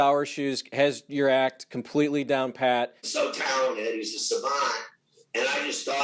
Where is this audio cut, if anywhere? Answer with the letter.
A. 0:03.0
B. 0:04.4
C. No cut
A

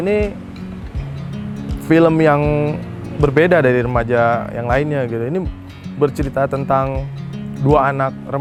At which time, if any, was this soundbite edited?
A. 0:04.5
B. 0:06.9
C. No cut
C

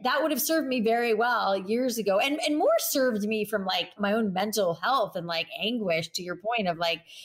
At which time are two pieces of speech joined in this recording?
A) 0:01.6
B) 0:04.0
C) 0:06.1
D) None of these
B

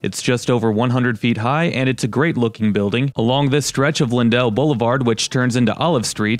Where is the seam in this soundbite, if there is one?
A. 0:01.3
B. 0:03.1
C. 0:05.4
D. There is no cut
B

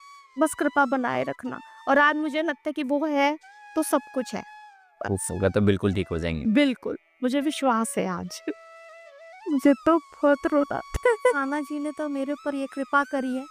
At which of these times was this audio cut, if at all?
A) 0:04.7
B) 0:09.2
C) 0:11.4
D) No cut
C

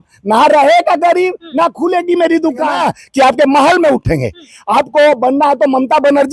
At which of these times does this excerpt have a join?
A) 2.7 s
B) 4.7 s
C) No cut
A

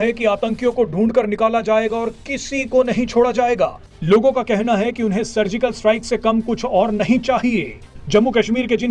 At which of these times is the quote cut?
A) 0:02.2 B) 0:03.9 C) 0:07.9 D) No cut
B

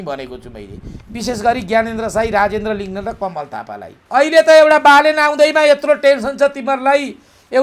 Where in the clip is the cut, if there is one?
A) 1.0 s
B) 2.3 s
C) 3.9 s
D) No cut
C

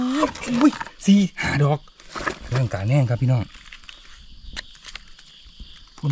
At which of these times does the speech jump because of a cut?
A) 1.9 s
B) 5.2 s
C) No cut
A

